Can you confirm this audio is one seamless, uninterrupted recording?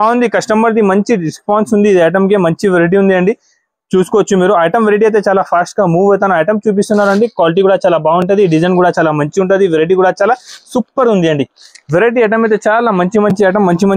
yes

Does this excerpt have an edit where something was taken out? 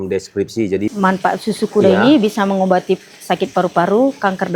yes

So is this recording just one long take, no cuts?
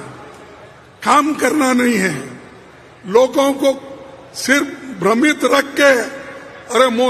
yes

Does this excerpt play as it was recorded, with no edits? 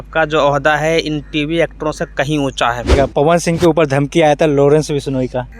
no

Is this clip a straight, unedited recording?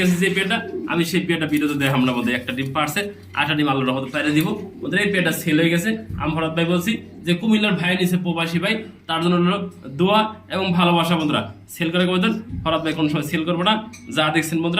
yes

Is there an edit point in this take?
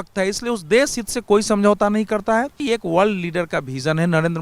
yes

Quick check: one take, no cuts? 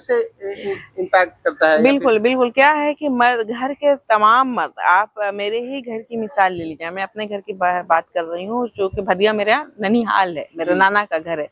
yes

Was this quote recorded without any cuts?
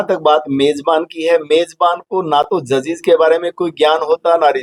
yes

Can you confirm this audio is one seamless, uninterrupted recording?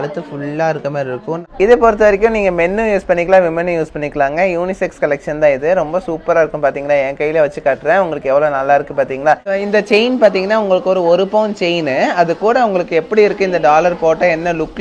no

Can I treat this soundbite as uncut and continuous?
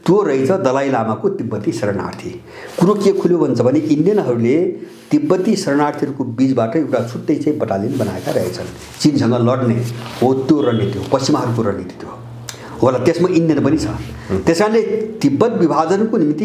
yes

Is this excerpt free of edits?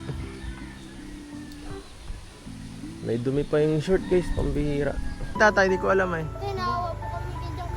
no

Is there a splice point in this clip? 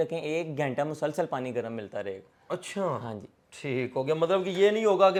no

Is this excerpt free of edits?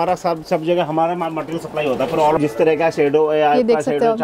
no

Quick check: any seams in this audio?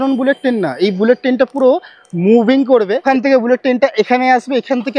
yes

